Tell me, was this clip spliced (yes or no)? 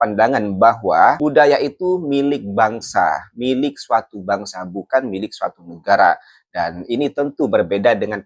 yes